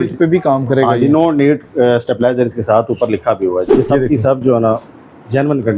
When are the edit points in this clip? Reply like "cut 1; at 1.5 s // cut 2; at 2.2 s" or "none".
cut 1; at 3.7 s